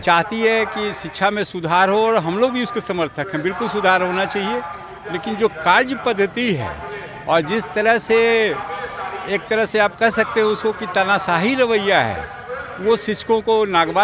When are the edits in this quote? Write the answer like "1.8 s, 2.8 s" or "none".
none

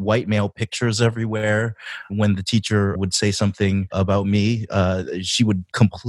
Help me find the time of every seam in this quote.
1.9 s, 3.0 s, 3.9 s

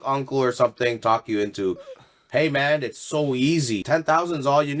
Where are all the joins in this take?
3.8 s

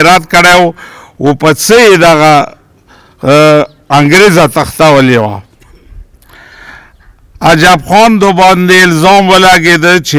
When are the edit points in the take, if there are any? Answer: none

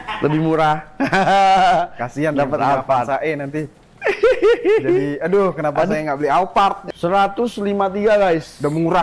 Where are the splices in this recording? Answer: 6.8 s

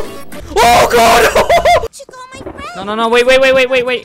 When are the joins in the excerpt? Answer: 2.0 s

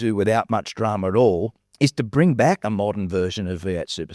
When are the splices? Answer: 1.6 s

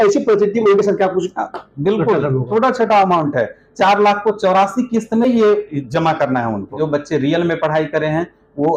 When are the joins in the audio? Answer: 2.5 s, 6.7 s

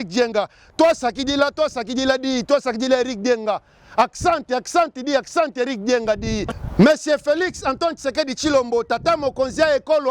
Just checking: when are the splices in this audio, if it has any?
6.5 s

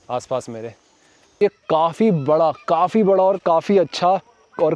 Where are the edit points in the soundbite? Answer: 1.4 s

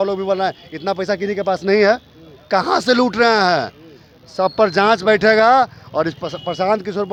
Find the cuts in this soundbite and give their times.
none

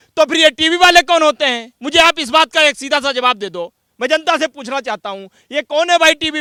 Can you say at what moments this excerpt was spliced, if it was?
none

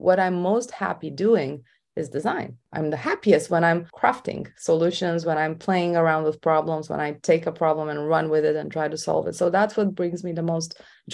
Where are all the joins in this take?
2.6 s

